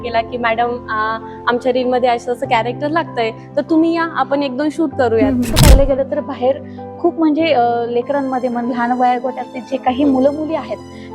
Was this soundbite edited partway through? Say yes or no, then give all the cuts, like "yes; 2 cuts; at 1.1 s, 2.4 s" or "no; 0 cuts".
yes; 1 cut; at 5.5 s